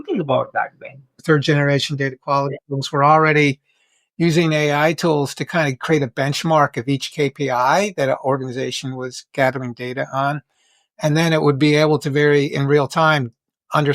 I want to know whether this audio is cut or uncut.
cut